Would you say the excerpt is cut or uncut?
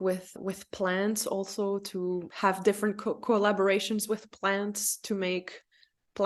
uncut